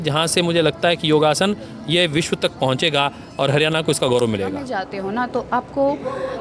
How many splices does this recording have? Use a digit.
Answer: 1